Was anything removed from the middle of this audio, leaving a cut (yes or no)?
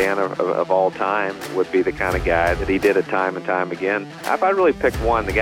yes